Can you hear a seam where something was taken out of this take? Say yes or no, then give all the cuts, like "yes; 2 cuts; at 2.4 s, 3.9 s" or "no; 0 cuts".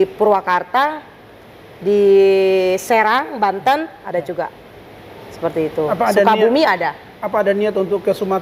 no; 0 cuts